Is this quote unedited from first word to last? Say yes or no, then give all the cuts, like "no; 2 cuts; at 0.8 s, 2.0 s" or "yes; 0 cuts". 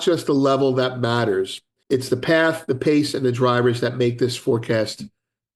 no; 1 cut; at 1.8 s